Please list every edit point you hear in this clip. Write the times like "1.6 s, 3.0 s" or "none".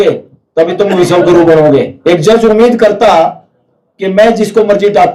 1.9 s

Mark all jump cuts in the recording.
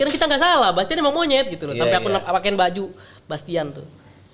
none

